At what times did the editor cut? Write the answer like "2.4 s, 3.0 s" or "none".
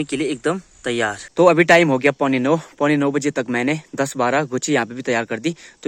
none